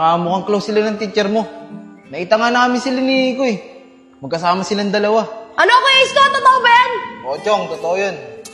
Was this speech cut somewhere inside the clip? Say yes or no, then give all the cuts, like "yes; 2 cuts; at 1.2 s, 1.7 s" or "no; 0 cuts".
no; 0 cuts